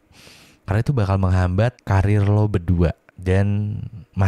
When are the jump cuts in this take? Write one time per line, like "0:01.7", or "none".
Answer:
0:01.8
0:03.1